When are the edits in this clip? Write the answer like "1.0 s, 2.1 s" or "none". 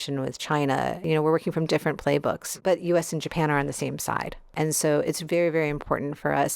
1.0 s, 2.4 s, 4.4 s